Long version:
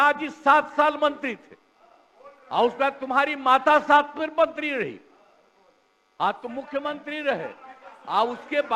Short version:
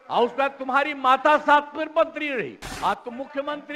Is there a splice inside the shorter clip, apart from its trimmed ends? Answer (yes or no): yes